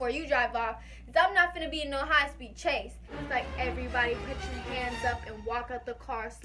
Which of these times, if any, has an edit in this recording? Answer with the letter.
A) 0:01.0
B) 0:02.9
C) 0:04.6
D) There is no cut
B